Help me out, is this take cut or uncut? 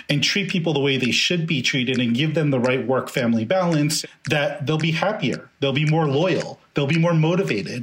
cut